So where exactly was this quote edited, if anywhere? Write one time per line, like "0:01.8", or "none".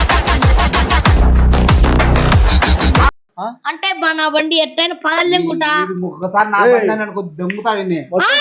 0:03.3